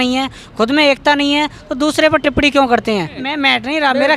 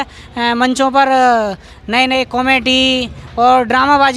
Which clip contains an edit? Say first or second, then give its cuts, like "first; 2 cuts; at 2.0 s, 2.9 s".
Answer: first; 1 cut; at 3.2 s